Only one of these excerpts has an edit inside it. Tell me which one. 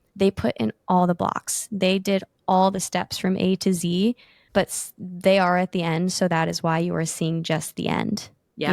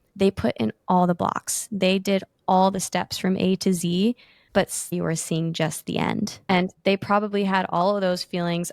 second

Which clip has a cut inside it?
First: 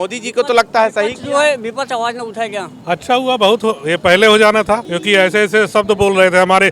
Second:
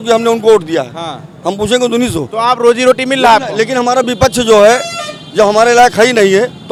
first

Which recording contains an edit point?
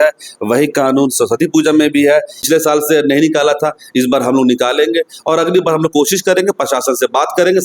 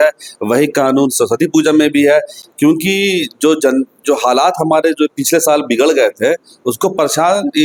first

